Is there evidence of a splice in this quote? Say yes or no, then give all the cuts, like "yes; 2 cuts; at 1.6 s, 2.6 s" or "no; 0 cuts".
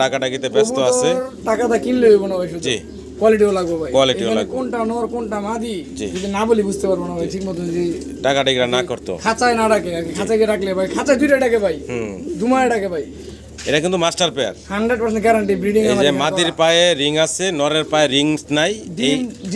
no; 0 cuts